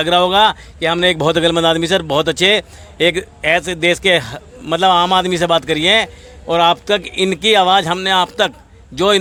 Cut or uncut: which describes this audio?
uncut